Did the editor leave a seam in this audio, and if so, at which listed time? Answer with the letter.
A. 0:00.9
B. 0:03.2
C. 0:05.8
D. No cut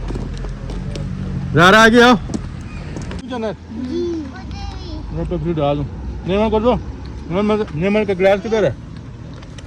B